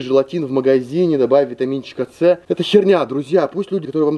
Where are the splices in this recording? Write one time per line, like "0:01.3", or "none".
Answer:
none

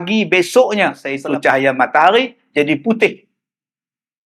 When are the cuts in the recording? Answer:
0:01.1

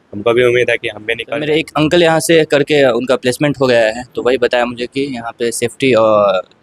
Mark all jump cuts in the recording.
0:01.3

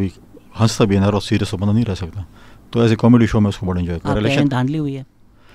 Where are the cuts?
0:04.1

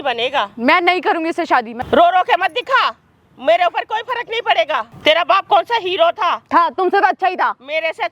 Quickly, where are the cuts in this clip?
0:01.8
0:04.9

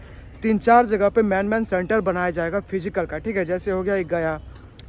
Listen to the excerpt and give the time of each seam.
none

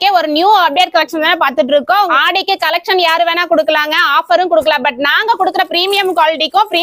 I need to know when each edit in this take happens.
0:02.1

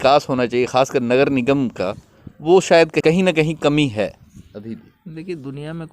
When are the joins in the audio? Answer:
0:03.0

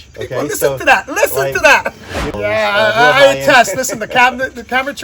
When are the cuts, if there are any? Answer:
0:02.3

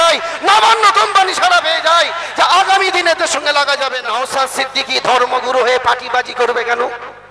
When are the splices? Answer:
0:04.0

